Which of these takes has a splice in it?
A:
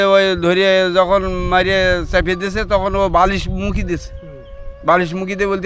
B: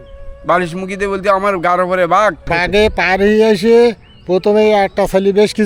B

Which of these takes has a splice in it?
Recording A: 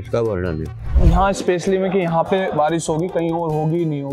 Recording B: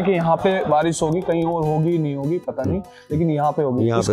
A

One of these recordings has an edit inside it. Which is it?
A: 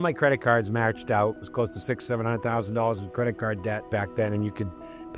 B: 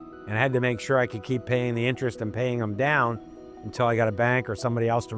A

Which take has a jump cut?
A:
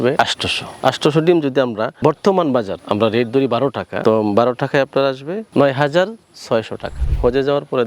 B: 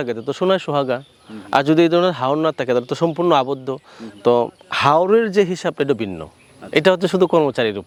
A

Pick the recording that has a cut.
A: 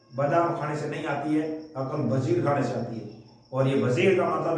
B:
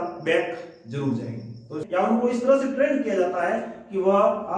B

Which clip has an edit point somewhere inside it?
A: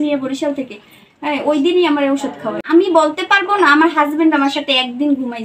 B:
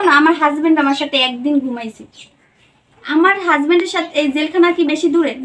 A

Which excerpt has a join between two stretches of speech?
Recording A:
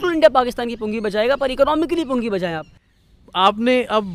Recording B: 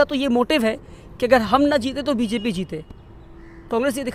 A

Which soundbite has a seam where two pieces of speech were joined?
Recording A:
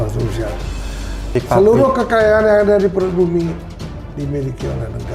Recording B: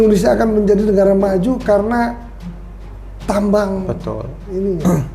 A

